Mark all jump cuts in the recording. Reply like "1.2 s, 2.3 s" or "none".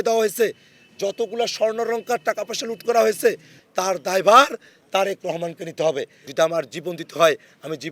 3.5 s, 6.2 s